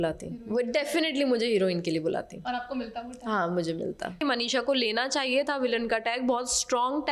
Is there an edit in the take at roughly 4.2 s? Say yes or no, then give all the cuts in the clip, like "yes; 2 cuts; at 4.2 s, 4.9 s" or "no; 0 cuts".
yes; 1 cut; at 4.2 s